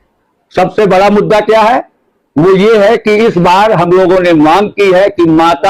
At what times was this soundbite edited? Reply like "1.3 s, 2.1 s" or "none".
none